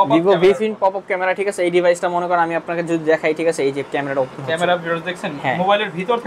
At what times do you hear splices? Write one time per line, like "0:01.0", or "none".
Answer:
none